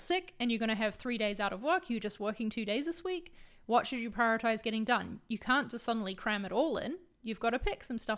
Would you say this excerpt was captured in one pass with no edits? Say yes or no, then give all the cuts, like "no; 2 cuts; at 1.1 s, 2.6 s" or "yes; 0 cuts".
yes; 0 cuts